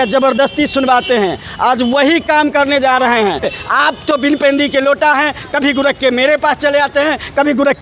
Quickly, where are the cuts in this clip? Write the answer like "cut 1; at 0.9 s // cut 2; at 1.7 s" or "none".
cut 1; at 3.5 s